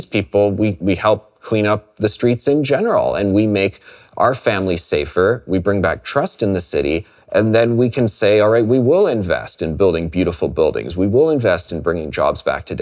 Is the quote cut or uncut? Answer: uncut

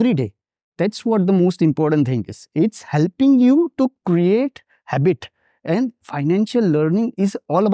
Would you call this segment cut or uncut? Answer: uncut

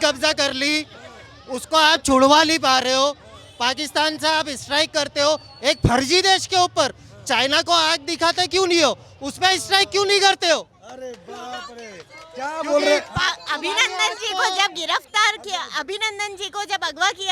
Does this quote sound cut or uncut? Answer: uncut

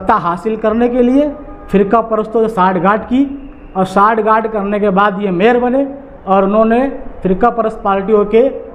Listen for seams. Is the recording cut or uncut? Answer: uncut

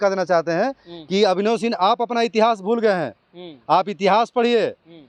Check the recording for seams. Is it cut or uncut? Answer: uncut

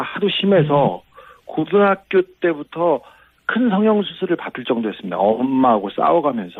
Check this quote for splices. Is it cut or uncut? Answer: uncut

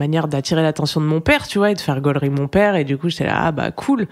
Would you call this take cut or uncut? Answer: uncut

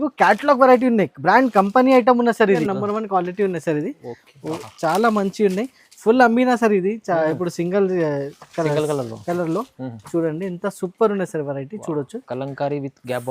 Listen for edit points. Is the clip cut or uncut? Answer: cut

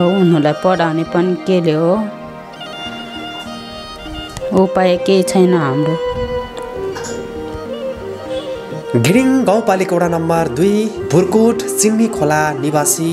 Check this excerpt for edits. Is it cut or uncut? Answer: cut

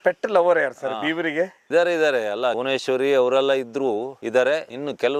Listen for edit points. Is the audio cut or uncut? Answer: uncut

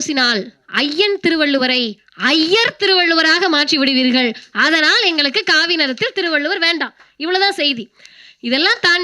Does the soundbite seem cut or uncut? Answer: uncut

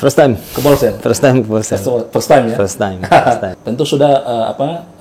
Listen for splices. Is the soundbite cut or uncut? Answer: cut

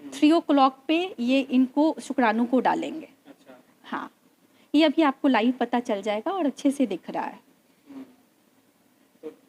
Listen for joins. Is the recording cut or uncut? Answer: uncut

